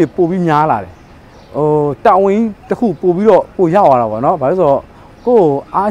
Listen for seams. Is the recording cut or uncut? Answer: uncut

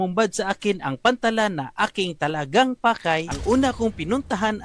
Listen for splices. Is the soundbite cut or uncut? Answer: cut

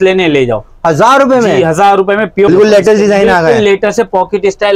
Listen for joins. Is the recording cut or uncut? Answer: cut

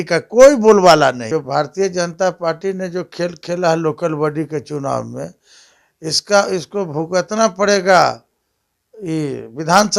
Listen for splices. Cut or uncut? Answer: cut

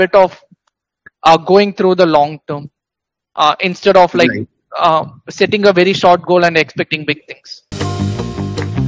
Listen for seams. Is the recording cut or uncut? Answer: cut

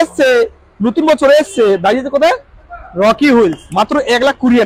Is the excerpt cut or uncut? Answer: uncut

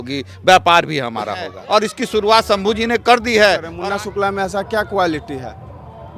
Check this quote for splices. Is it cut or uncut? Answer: cut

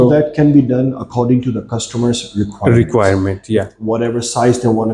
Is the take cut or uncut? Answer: uncut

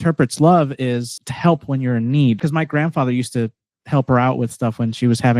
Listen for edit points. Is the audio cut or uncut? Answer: cut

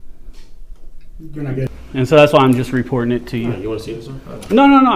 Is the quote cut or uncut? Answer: cut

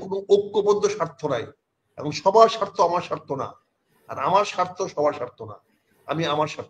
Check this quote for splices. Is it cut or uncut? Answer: uncut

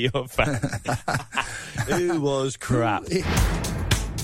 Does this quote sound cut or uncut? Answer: cut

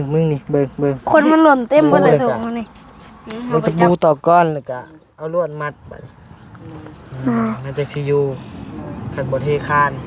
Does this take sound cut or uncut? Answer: cut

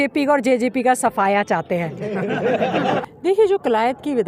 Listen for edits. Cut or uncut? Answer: cut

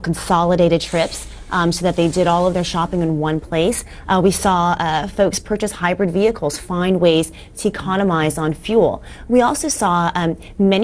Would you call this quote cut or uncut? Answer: cut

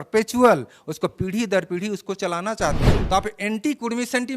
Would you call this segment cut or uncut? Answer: cut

